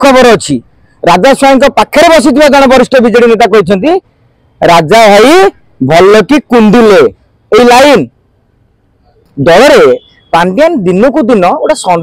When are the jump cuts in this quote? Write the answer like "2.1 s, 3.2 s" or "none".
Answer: 9.1 s